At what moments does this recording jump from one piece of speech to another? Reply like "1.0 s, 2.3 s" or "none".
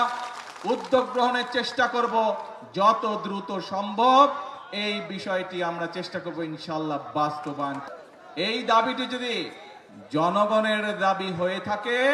7.8 s